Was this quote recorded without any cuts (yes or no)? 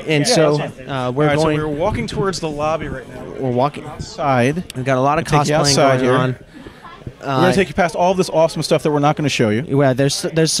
yes